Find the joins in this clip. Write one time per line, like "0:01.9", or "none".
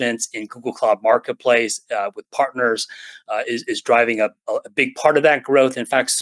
none